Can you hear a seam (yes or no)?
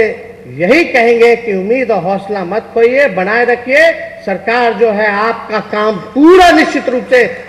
no